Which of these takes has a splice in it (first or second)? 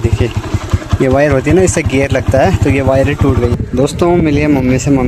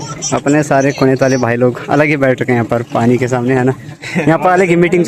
first